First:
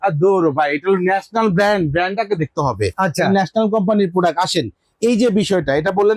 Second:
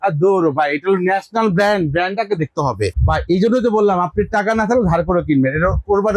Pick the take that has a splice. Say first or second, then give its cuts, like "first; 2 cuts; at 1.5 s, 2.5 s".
second; 1 cut; at 2.9 s